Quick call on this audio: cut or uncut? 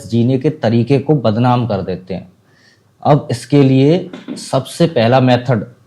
uncut